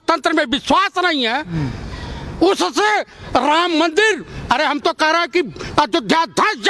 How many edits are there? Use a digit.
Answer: 0